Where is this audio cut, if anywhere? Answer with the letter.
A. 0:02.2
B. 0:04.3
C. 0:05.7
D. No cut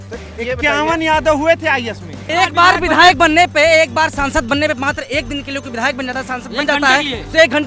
A